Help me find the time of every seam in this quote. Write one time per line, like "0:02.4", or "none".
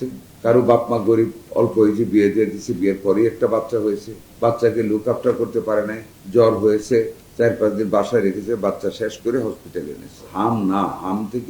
0:10.3